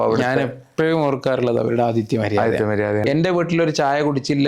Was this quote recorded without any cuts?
no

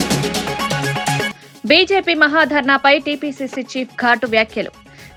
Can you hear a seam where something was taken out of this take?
no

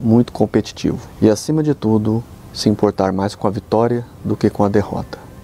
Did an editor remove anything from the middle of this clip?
yes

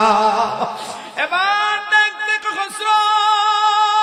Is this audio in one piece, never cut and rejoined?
yes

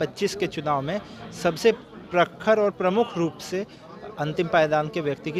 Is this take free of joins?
yes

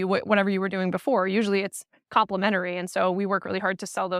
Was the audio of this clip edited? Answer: no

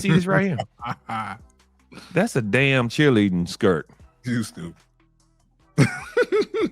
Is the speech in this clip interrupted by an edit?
no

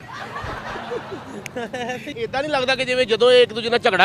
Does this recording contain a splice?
yes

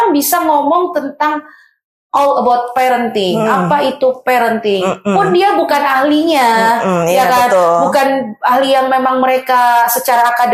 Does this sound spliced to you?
no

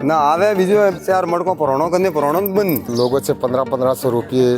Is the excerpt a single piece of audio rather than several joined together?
no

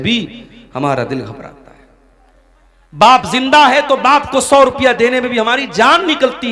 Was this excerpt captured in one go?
yes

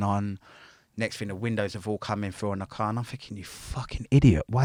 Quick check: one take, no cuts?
yes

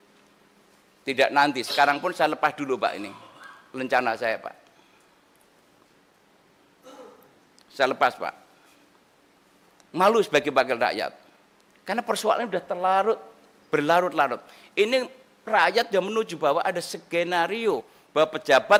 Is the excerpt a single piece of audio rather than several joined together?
yes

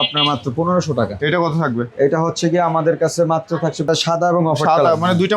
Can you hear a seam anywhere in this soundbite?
yes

